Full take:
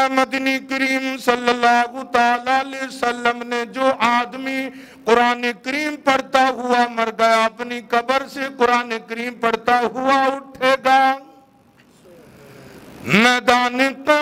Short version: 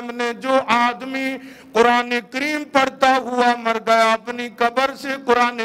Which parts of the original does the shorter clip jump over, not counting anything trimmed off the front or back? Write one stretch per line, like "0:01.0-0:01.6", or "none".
none

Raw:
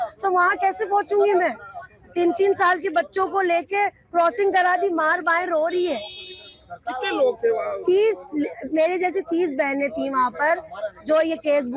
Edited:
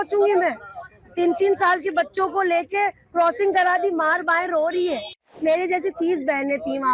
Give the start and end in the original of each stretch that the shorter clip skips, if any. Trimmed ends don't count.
0:06.3-0:08.6

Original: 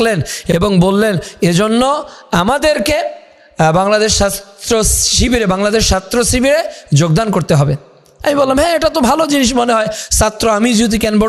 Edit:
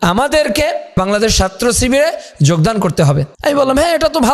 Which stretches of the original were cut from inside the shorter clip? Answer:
0:03.3-0:05.5
0:07.8-0:08.1

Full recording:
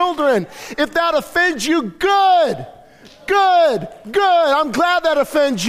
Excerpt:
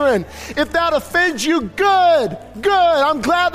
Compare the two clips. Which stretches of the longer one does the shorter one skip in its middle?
0:01.9-0:03.2

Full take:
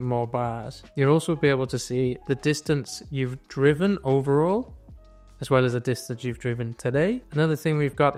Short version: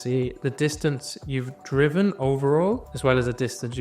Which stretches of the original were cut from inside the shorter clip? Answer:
0:04.7-0:05.4

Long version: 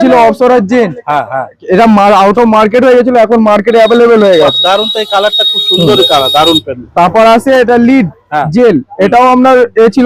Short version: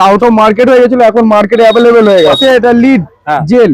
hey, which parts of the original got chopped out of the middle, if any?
0:04.5-0:07.4

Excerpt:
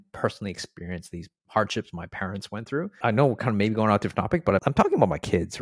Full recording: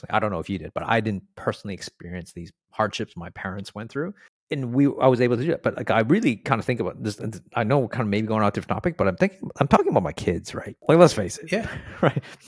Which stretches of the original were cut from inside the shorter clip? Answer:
0:04.2-0:07.4
0:09.1-0:09.6

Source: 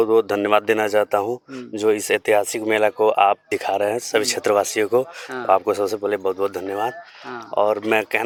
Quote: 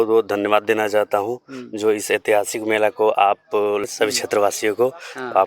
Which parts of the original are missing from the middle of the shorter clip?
0:03.7-0:03.9

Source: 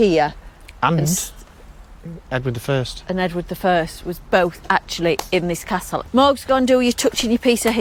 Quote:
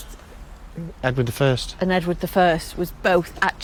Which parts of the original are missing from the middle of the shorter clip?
none

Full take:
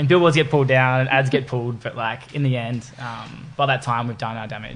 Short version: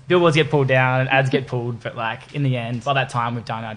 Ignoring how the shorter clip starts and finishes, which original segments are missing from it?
0:02.8-0:03.5

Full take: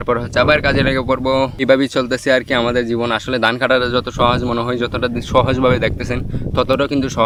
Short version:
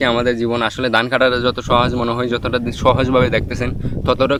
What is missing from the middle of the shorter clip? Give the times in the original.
none

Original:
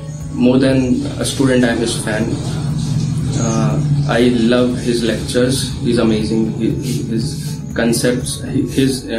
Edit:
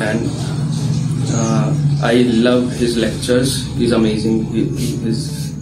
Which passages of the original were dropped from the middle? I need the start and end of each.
none

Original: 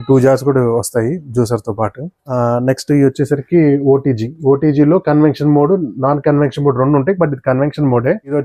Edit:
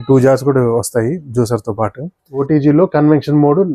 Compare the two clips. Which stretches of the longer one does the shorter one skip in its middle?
0:02.3-0:04.4

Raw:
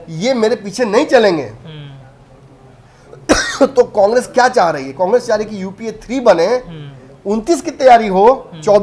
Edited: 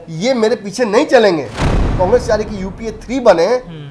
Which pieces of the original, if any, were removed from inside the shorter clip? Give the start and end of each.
0:01.9-0:04.9

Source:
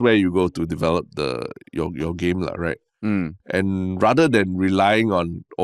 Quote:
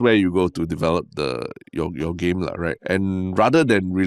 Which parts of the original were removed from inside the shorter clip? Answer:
0:02.8-0:03.4

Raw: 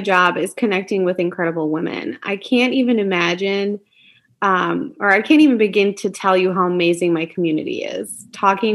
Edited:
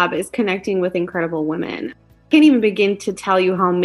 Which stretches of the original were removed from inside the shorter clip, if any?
0:02.5-0:05.2

